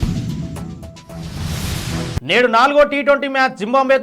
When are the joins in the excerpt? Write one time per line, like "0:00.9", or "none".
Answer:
0:02.2

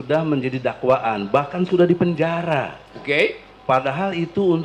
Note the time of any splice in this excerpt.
none

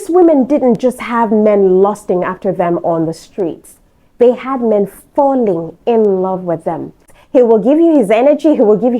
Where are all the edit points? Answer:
0:07.0

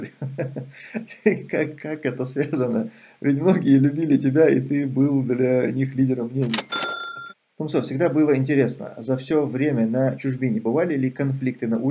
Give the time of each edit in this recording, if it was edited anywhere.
0:06.7

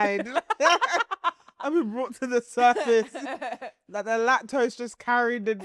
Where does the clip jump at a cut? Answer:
none

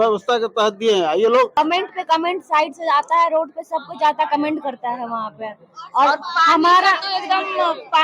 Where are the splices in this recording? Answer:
0:01.5

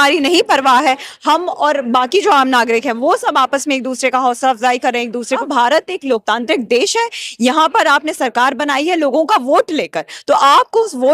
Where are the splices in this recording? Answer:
0:05.4

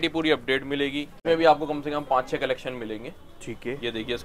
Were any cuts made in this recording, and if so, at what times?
0:01.2

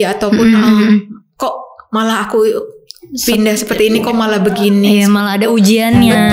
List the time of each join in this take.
none

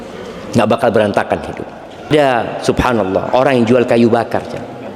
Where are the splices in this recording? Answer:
0:02.1

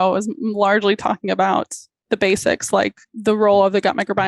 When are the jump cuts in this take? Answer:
0:02.1
0:03.1

